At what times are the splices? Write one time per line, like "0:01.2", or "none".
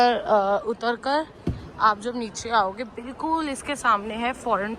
none